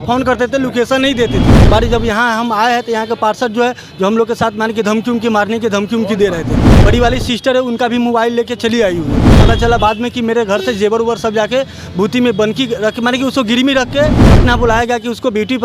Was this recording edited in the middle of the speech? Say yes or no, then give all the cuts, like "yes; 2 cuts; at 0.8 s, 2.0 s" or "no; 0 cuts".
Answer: yes; 4 cuts; at 1.5 s, 6.8 s, 9.3 s, 14.3 s